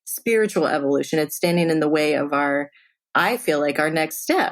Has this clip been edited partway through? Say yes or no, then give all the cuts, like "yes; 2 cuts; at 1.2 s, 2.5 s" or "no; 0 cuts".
yes; 1 cut; at 3.1 s